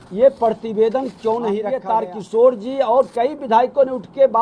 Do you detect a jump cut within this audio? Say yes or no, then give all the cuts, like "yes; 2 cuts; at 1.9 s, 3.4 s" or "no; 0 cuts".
yes; 1 cut; at 1.8 s